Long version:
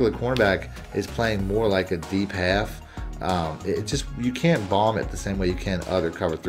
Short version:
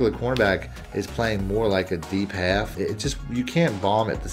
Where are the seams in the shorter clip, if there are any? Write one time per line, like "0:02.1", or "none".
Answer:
0:02.7